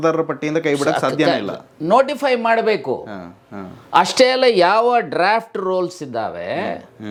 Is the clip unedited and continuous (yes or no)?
yes